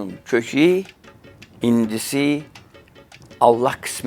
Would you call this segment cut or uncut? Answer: uncut